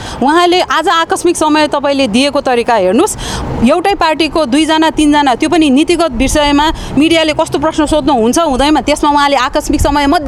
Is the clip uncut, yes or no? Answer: yes